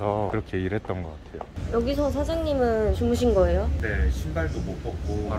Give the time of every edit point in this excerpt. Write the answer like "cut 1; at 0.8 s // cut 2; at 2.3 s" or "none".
cut 1; at 1.5 s